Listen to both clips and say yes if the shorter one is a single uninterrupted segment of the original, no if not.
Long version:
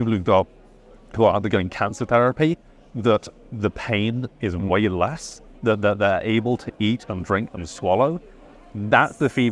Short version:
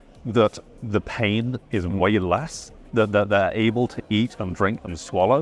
yes